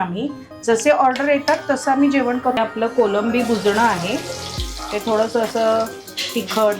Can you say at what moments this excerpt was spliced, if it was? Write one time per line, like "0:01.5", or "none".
0:02.6